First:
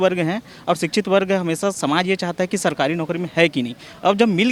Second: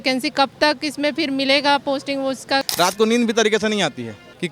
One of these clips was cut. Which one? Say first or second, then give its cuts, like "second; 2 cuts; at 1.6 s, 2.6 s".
second; 1 cut; at 2.7 s